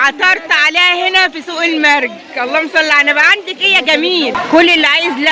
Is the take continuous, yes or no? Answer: no